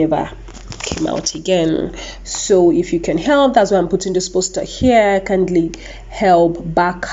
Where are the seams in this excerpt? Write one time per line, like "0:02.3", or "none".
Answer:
none